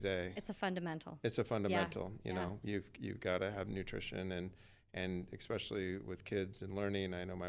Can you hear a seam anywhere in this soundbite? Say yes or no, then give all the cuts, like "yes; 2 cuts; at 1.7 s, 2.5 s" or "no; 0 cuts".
no; 0 cuts